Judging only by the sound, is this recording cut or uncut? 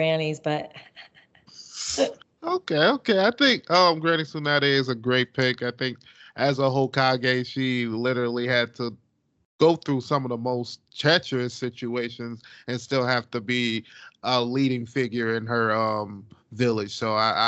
uncut